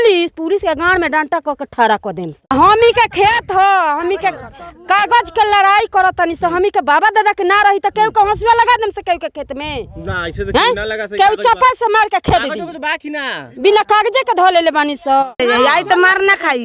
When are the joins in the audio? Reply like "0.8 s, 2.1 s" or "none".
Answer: 2.4 s, 15.2 s

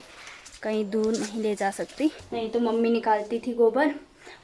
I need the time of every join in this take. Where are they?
2.2 s

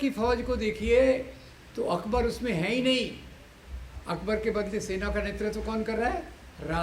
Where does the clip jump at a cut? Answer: none

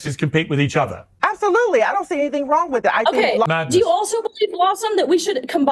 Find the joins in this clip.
3.6 s

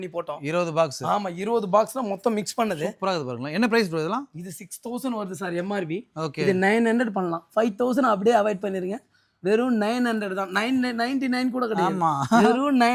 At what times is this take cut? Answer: none

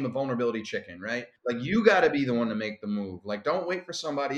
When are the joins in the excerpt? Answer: 1.3 s

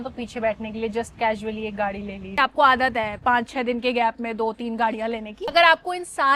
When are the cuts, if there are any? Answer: 2.3 s, 5.4 s

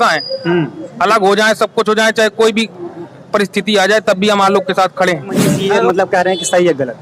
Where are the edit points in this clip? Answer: 5.5 s

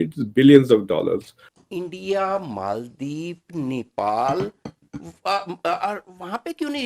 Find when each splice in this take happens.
1.4 s

